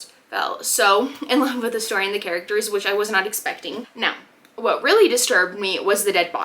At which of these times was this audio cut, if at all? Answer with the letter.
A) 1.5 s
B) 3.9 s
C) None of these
B